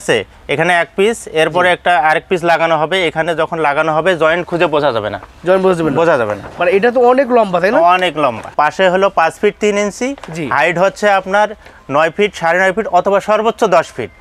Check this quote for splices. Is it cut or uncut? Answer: uncut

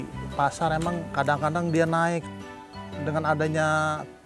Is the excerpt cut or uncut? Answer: cut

